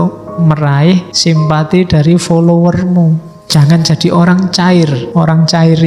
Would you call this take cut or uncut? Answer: cut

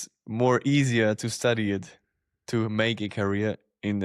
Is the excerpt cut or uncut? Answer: uncut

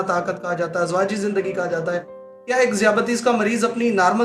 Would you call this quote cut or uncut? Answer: uncut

